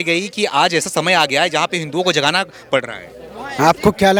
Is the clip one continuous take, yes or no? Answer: yes